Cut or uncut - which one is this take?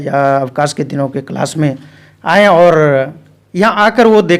uncut